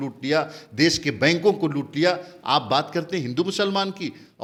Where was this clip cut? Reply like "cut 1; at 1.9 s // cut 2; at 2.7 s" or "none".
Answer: none